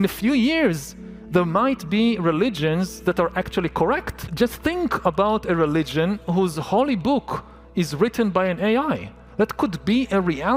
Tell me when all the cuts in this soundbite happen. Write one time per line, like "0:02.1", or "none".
0:04.2